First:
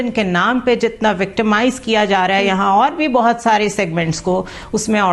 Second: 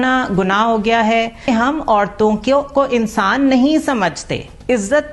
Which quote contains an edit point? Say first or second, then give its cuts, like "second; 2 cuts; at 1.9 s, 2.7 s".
second; 1 cut; at 1.4 s